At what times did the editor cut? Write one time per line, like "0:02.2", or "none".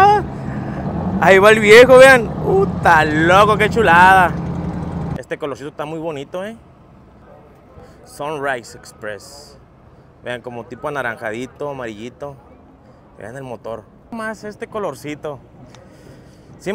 0:05.2
0:14.1